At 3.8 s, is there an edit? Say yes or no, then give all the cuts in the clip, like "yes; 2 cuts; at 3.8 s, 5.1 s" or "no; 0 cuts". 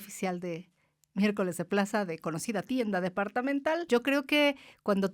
yes; 1 cut; at 3.8 s